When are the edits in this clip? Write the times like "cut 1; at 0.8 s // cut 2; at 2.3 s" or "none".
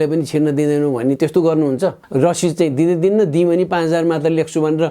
cut 1; at 2.0 s